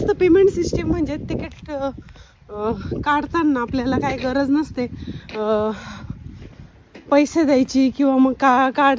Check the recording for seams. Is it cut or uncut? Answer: uncut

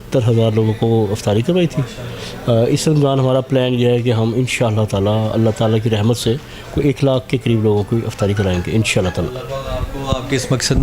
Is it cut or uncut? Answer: uncut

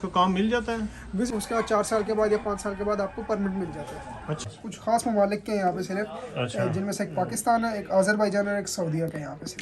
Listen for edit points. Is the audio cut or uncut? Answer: cut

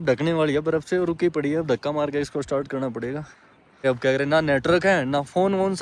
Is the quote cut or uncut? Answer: cut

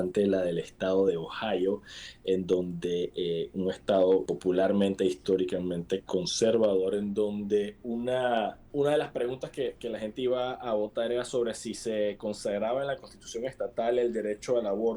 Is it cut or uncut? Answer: cut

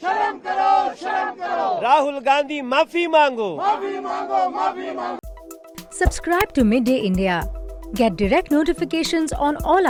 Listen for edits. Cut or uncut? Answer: uncut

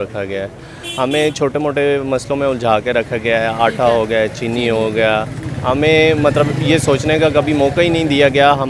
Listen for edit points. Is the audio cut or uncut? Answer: uncut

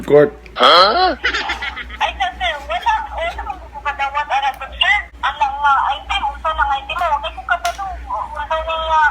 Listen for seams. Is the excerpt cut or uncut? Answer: cut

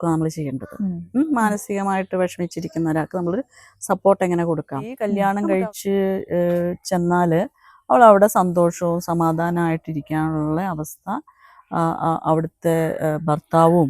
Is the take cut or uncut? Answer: cut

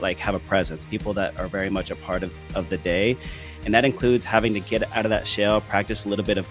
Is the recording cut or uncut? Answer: uncut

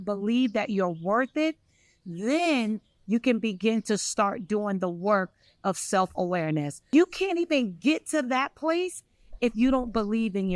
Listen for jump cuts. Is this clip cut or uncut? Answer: cut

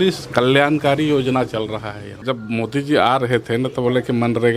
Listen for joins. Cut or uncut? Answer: cut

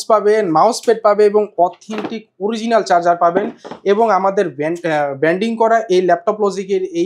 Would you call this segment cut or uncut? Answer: uncut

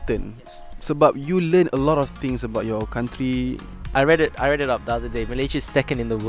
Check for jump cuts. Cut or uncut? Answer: cut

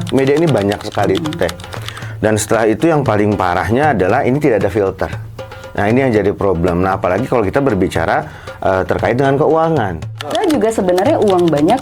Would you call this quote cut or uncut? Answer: cut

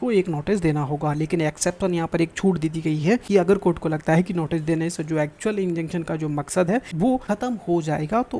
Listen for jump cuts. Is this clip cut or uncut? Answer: cut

